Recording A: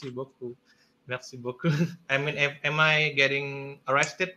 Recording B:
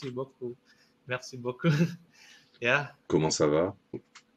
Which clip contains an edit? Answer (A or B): A